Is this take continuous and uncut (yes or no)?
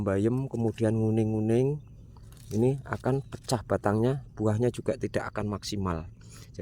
yes